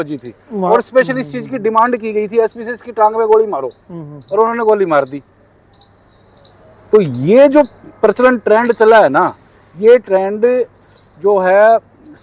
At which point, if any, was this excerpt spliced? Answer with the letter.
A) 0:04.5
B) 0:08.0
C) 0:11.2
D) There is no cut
D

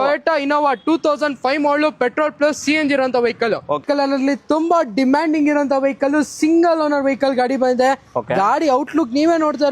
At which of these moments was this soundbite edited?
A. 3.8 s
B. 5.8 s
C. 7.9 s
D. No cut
A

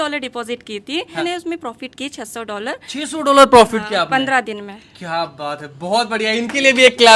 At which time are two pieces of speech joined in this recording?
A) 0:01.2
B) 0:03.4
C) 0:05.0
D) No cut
A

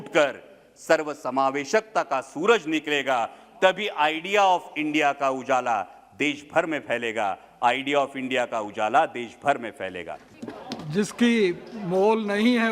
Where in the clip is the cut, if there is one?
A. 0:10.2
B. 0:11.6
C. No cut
A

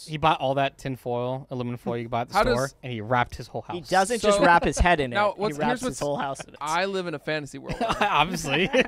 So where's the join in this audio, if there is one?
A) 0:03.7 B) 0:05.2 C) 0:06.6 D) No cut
C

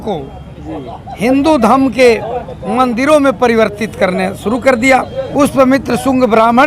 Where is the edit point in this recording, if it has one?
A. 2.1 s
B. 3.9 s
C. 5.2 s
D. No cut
C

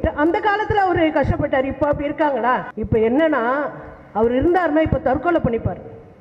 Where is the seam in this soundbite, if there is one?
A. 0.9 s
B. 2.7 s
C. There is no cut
B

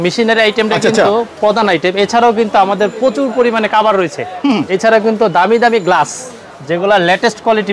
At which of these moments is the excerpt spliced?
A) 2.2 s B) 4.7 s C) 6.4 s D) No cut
B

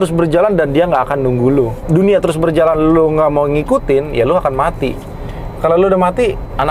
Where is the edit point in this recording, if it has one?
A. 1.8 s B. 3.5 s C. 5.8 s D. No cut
A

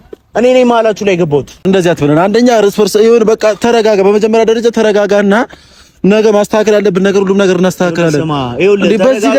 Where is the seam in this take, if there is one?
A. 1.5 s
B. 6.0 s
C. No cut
C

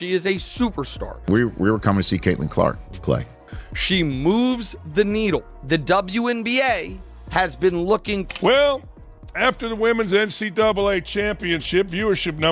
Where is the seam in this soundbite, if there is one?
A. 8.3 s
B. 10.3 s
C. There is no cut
A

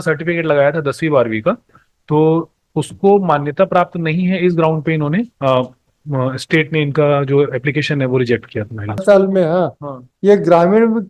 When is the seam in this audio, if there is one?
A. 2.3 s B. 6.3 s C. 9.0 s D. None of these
C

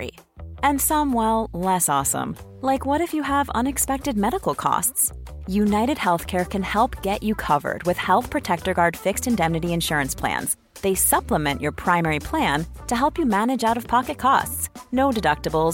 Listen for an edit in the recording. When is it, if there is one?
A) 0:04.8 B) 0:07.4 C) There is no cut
C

